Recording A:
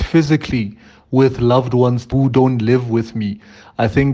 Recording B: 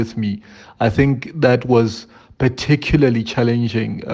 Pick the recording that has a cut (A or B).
A